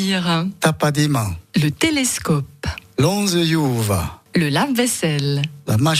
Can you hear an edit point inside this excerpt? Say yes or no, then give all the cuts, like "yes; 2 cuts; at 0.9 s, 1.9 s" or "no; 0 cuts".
yes; 2 cuts; at 1.4 s, 4.1 s